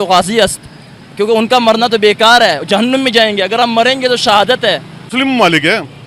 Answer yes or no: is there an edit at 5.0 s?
yes